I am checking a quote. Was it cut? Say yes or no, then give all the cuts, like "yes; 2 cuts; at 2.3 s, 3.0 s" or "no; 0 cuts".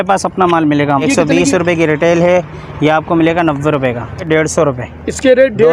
yes; 2 cuts; at 1.0 s, 4.2 s